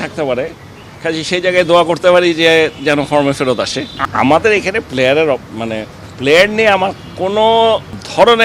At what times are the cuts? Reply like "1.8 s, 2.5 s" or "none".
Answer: 4.0 s